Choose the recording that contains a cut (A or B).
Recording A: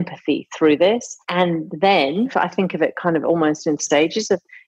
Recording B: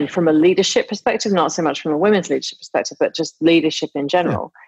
A